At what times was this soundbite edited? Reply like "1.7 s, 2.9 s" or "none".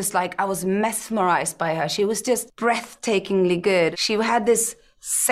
2.5 s, 3.9 s